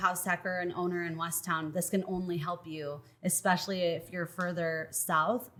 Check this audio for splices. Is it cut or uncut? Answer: uncut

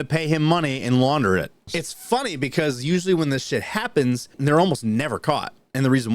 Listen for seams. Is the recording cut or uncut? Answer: cut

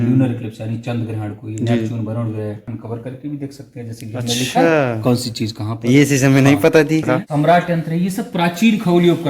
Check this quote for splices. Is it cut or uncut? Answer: cut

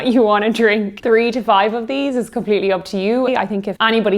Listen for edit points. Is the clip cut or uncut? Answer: cut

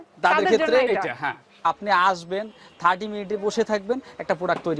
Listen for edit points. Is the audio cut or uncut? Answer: cut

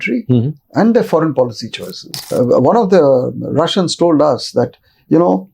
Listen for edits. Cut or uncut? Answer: cut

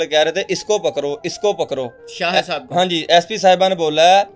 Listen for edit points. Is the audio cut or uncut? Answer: uncut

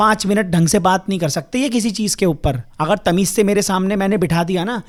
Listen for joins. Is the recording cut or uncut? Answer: uncut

